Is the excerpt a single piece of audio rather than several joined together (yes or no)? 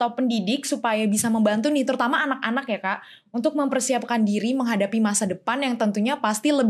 yes